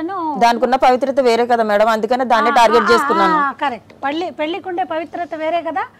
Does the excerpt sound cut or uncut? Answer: uncut